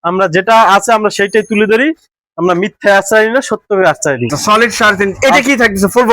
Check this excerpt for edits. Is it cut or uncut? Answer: cut